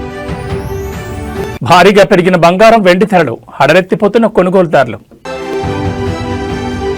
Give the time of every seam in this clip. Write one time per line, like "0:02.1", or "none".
0:01.5
0:05.4